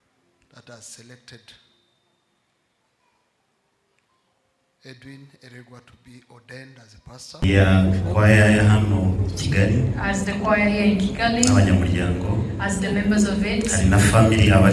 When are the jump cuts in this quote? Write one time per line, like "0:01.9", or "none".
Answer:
0:07.4